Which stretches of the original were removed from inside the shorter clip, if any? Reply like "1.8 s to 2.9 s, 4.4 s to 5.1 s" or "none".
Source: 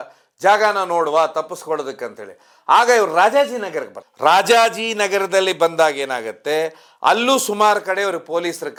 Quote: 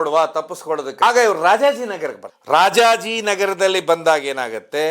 2.0 s to 2.7 s